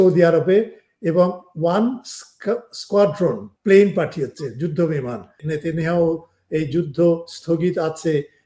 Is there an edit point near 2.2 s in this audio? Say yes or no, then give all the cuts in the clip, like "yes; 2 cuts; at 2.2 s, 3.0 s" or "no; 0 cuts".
no; 2 cuts; at 3.5 s, 5.4 s